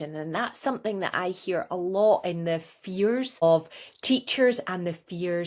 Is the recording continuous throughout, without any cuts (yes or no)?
no